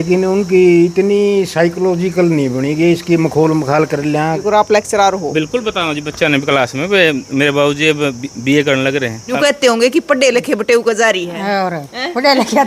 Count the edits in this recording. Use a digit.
2